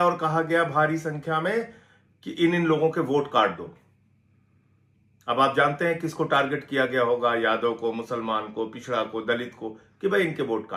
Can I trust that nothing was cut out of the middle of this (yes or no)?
yes